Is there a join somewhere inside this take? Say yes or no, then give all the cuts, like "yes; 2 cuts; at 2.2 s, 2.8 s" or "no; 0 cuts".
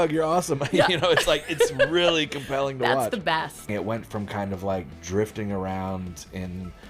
yes; 1 cut; at 3.7 s